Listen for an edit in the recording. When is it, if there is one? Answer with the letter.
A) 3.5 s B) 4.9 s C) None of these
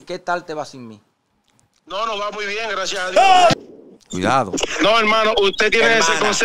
A